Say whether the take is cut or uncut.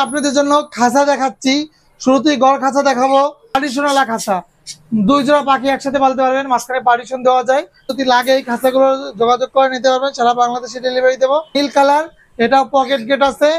cut